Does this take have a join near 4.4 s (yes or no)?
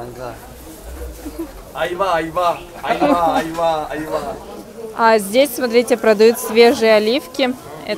yes